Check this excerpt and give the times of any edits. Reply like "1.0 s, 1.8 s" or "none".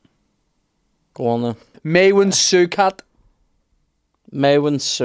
1.7 s